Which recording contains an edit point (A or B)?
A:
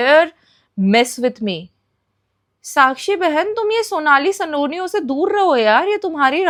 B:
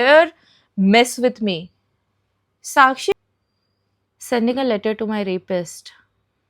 B